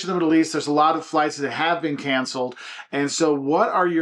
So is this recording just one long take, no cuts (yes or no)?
yes